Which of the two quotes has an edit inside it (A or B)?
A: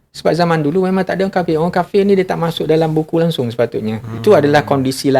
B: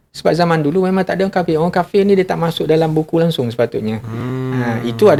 A